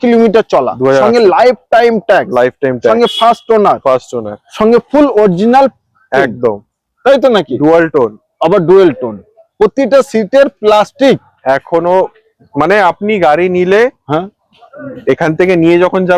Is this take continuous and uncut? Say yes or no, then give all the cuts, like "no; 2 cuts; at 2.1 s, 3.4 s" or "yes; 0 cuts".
yes; 0 cuts